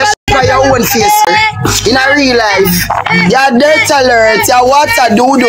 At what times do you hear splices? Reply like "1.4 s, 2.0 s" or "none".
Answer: 1.2 s